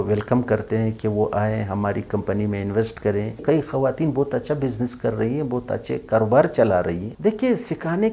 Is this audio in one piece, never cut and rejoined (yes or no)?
no